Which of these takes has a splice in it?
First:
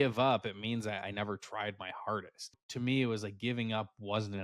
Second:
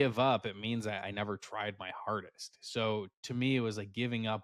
first; 1 cut; at 2.6 s

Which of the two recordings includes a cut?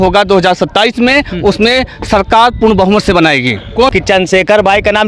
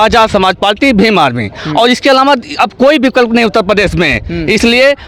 first; 1 cut; at 3.9 s

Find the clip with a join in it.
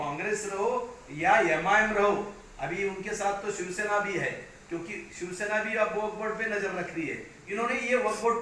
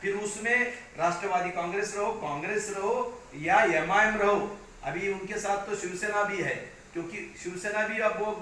first; 1 cut; at 7.4 s

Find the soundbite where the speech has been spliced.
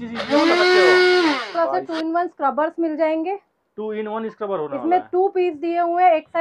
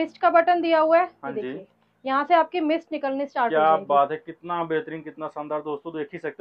first; 1 cut; at 1.6 s

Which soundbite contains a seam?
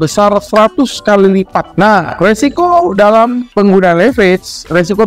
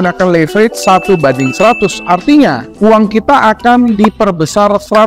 first; 1 cut; at 1.6 s

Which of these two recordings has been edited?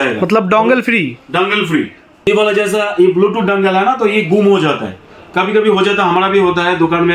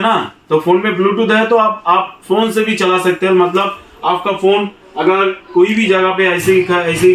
first; 1 cut; at 2.3 s

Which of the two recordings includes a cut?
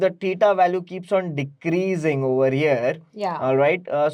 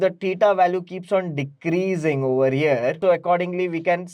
second; 1 cut; at 3.0 s

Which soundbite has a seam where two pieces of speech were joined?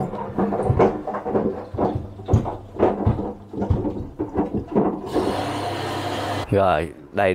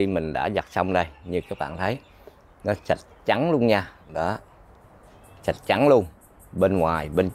first; 1 cut; at 6.4 s

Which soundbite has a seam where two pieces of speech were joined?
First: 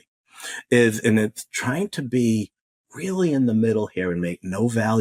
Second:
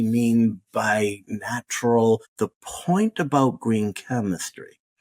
second; 1 cut; at 2.3 s

